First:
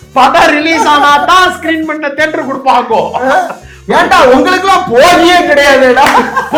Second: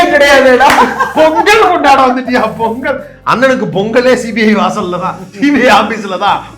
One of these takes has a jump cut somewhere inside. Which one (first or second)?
second